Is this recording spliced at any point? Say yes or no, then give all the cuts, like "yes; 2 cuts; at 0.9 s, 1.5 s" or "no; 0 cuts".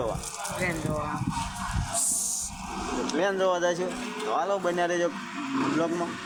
no; 0 cuts